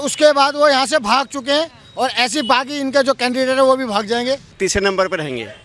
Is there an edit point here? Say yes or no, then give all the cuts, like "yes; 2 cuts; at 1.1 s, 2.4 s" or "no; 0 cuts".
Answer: yes; 1 cut; at 4.5 s